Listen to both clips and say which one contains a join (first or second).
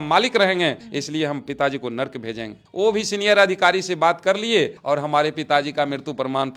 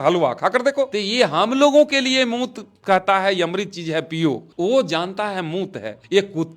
second